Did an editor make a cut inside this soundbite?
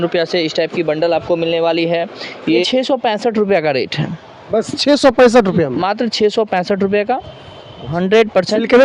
yes; 2 cuts; at 2.6 s, 7.8 s

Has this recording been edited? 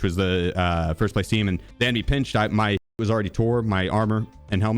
yes; 1 cut; at 1.7 s

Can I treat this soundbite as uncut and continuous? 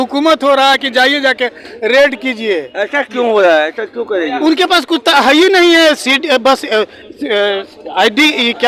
yes; 0 cuts

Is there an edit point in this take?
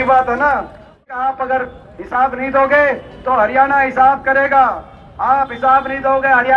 yes; 1 cut; at 1.1 s

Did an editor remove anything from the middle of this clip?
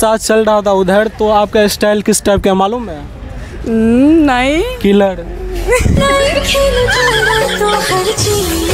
yes; 1 cut; at 5.9 s

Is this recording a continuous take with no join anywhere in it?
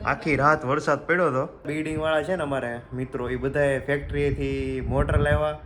no; 1 cut; at 1.7 s

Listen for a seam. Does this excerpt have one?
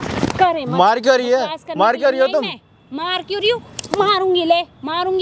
no; 0 cuts

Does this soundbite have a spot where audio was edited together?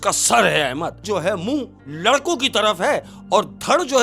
yes; 1 cut; at 1.0 s

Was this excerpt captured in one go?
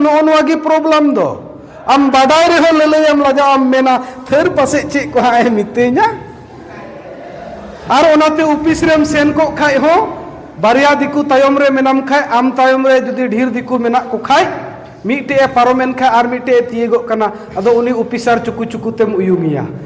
yes; 0 cuts

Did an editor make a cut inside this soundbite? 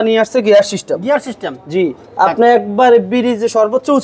no; 0 cuts

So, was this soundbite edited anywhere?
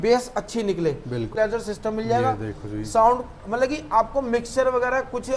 yes; 1 cut; at 1.4 s

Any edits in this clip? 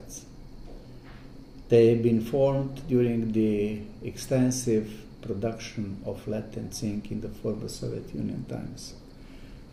no; 0 cuts

